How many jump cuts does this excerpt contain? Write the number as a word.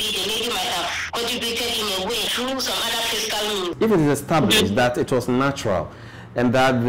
three